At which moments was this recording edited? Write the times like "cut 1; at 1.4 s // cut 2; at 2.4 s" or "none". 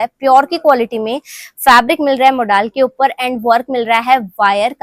none